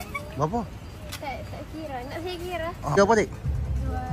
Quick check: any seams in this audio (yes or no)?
yes